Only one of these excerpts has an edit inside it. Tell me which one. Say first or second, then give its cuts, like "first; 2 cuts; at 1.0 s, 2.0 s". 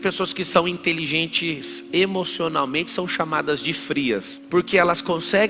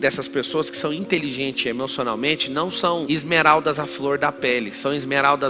first; 1 cut; at 4.4 s